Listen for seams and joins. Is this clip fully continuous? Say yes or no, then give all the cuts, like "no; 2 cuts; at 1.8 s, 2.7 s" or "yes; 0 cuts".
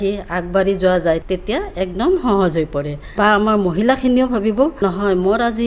no; 3 cuts; at 1.2 s, 3.0 s, 4.8 s